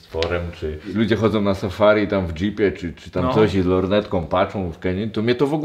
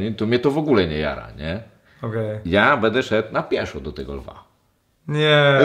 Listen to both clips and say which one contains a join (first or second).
first